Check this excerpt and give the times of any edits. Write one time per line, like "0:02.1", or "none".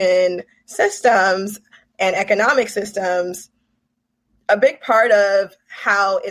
none